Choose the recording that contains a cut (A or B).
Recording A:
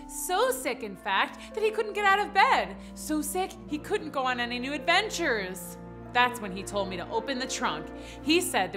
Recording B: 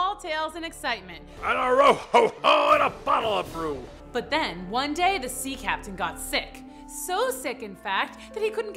B